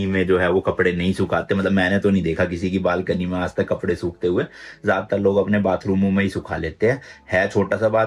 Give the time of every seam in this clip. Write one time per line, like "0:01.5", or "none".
none